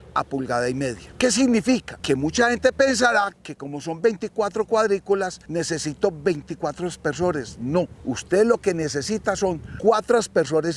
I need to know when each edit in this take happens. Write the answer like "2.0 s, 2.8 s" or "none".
1.9 s, 5.4 s, 8.0 s, 9.7 s